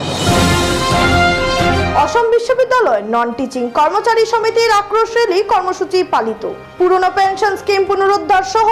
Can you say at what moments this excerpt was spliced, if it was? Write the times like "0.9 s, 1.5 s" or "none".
1.7 s

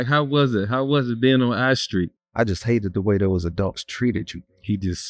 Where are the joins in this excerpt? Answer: 2.2 s

